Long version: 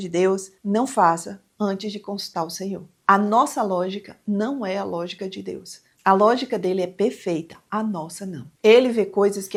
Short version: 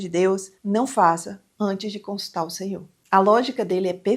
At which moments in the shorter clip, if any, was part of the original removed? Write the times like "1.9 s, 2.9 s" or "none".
2.9 s